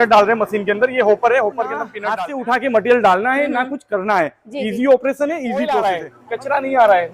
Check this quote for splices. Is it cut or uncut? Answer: cut